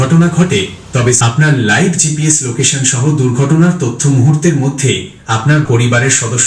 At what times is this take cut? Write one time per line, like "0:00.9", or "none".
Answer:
0:01.2
0:05.6